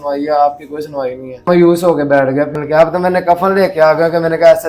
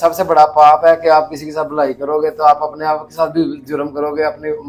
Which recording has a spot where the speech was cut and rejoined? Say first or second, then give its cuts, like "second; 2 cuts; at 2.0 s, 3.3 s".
first; 2 cuts; at 1.5 s, 2.5 s